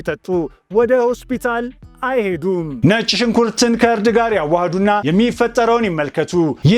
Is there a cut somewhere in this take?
yes; 1 cut; at 2.8 s

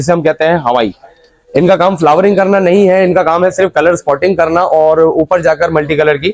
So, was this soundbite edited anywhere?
no; 0 cuts

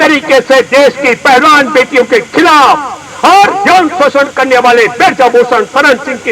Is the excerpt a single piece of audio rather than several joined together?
yes; 0 cuts

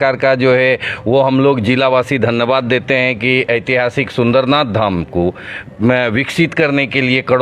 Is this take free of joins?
yes; 0 cuts

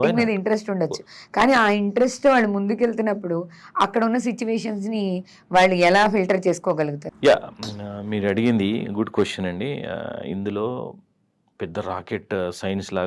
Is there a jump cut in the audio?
yes; 1 cut; at 7.0 s

